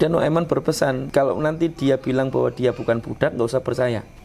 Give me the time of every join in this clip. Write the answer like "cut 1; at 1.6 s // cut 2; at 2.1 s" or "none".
cut 1; at 1.0 s